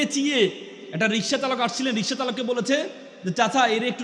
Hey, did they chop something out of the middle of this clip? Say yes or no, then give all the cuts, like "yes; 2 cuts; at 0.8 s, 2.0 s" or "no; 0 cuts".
no; 0 cuts